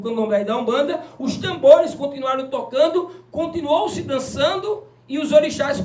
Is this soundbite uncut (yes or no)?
yes